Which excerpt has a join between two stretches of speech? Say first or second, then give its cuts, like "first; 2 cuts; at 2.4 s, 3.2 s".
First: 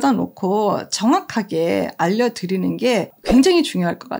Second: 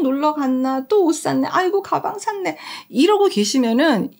first; 1 cut; at 3.1 s